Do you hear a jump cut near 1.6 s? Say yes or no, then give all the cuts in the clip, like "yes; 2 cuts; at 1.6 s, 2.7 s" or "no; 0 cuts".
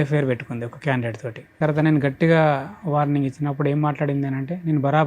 yes; 1 cut; at 1.6 s